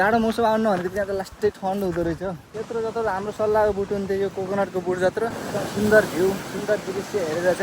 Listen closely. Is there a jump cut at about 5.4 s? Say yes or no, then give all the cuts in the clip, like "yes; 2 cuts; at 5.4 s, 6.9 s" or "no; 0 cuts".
yes; 2 cuts; at 2.5 s, 5.4 s